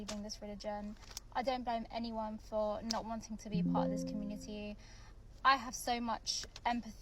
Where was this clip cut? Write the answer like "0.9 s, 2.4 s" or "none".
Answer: 1.8 s